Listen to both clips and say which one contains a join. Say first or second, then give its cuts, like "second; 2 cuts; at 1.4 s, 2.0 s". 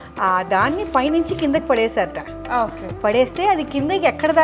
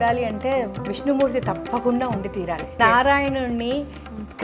second; 1 cut; at 2.8 s